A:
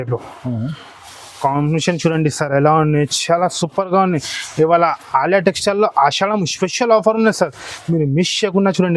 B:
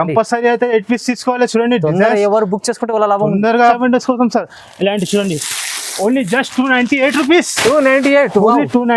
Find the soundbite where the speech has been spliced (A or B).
B